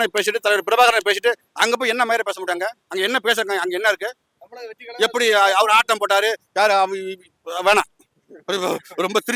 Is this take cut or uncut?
uncut